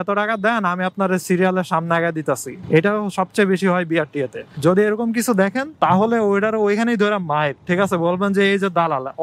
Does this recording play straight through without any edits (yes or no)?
yes